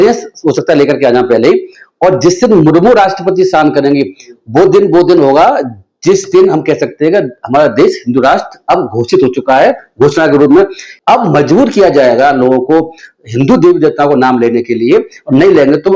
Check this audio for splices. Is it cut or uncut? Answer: cut